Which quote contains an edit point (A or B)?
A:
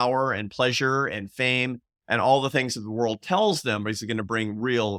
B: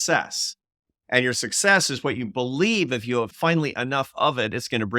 B